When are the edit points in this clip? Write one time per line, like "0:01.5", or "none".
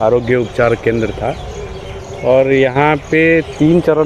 none